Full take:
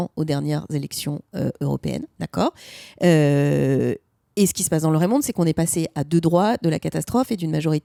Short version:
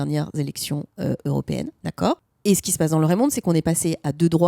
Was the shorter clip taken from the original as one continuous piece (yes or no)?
no